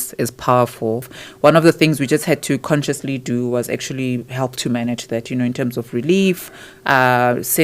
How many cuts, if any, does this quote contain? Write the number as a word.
one